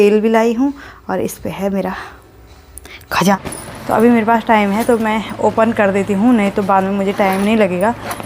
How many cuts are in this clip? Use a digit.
1